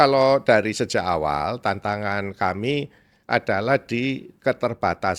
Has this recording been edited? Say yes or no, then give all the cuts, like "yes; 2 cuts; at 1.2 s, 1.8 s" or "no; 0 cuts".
no; 0 cuts